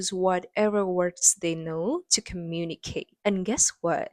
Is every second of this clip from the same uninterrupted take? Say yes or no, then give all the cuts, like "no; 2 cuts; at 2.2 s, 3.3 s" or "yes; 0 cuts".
yes; 0 cuts